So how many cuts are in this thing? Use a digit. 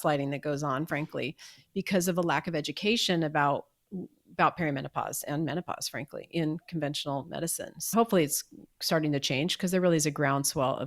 1